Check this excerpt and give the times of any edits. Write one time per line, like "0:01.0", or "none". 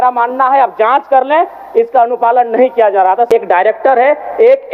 0:03.3